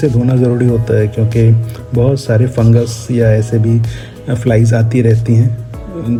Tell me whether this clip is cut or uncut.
uncut